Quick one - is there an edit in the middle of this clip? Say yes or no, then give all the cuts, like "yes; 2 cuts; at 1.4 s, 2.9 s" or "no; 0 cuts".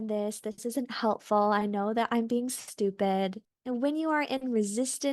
yes; 1 cut; at 3.5 s